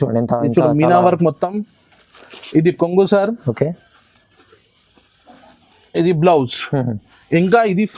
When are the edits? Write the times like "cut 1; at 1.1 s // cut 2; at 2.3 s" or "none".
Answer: none